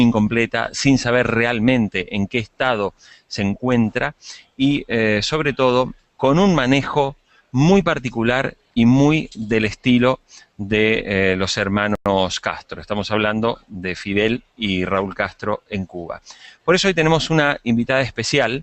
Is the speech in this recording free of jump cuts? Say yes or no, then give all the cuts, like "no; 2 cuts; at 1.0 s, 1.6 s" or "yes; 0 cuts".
no; 1 cut; at 13.5 s